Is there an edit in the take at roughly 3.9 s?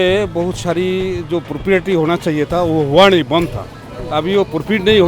yes; 1 cut; at 3.9 s

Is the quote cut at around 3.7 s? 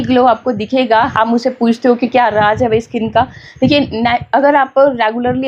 no; 1 cut; at 1.1 s

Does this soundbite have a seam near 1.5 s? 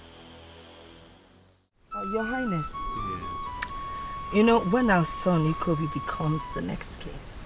yes; 1 cut; at 1.5 s

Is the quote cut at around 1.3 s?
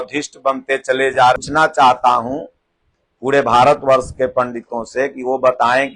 yes; 1 cut; at 1.3 s

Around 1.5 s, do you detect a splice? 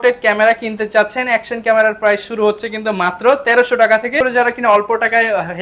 no; 1 cut; at 4.1 s

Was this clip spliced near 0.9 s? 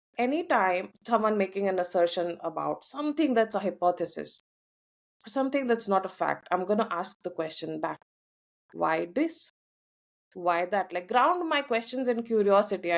yes; 1 cut; at 0.9 s

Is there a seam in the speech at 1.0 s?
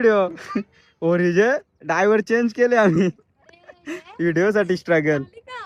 no; 0 cuts

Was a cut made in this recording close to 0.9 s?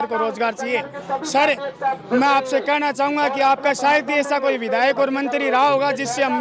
no; 0 cuts

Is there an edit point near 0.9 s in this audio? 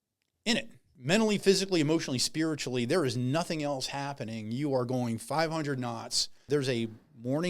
yes; 2 cuts; at 0.9 s, 6.4 s

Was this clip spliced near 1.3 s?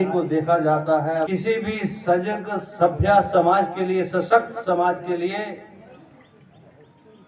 yes; 1 cut; at 1.3 s

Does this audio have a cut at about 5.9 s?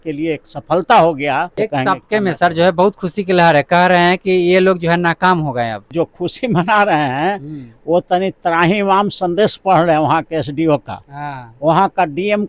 yes; 2 cuts; at 1.5 s, 5.9 s

